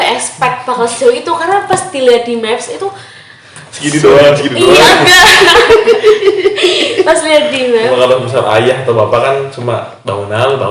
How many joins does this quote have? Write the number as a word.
one